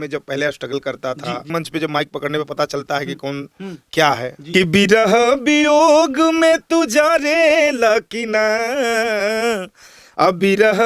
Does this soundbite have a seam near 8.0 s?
no; 2 cuts; at 1.5 s, 4.4 s

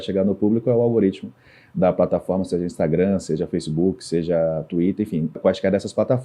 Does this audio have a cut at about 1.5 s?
no; 1 cut; at 5.4 s

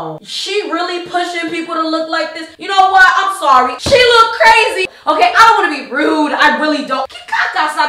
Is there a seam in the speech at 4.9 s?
yes; 2 cuts; at 3.8 s, 4.9 s

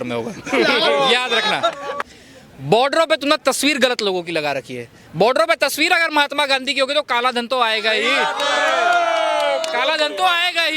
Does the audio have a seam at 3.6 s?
no; 1 cut; at 2.0 s

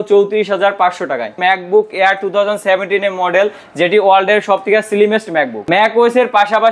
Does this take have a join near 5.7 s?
yes; 2 cuts; at 1.3 s, 5.7 s

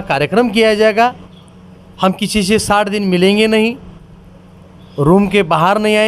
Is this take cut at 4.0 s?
no; 1 cut; at 1.3 s

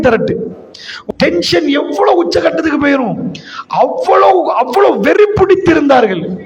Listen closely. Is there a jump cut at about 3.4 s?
no; 1 cut; at 0.9 s

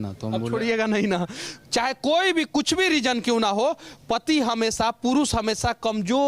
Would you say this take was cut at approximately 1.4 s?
yes; 1 cut; at 1.4 s

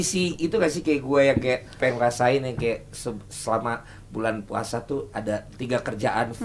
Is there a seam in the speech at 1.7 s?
yes; 2 cuts; at 1.7 s, 5.5 s

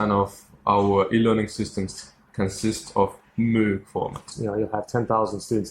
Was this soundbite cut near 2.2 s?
no; 1 cut; at 4.2 s

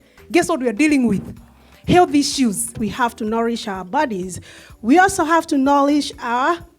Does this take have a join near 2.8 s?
yes; 1 cut; at 2.8 s

